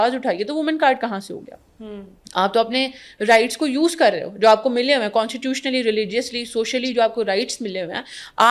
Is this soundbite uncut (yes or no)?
yes